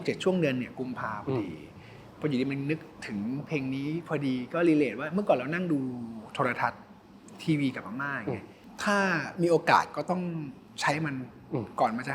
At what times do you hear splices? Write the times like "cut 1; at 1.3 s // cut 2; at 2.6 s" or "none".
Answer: cut 1; at 8.6 s // cut 2; at 10.6 s